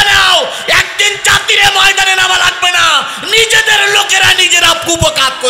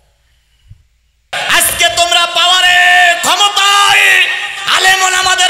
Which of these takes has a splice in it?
second; 1 cut; at 1.3 s

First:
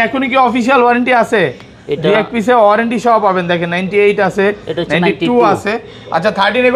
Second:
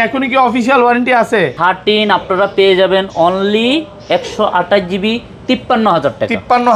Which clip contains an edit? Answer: second; 1 cut; at 1.5 s

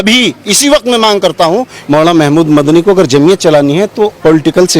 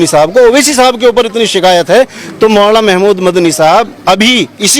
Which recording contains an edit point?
first; 1 cut; at 1.8 s

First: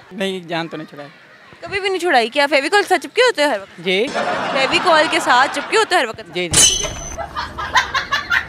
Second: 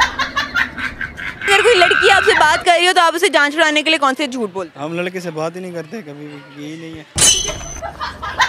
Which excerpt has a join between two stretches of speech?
second; 1 cut; at 1.4 s

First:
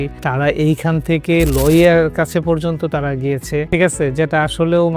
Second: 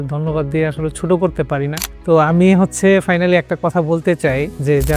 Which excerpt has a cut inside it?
second; 1 cut; at 1.8 s

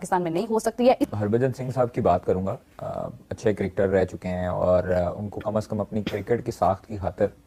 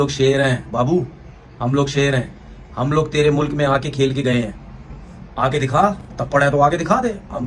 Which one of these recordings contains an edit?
first; 1 cut; at 1.1 s

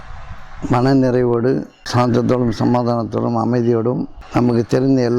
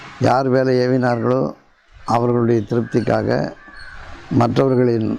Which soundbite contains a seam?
first; 2 cuts; at 1.8 s, 4.2 s

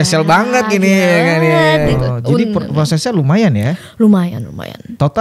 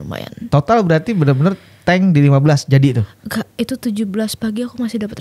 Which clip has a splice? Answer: first; 1 cut; at 1.9 s

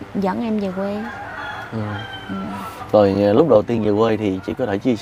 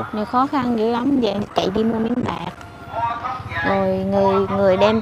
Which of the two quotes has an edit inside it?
second; 1 cut; at 1.3 s

